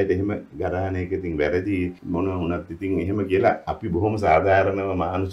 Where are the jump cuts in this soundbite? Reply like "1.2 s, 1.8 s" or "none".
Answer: 2.0 s